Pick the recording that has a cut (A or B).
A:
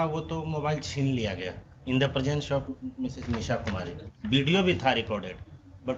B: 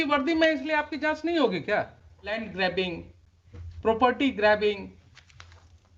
B